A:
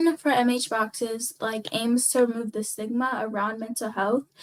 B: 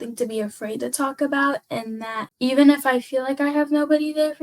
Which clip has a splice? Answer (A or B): B